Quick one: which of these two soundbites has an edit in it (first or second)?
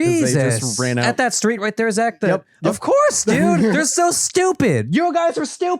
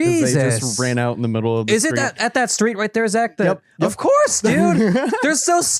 first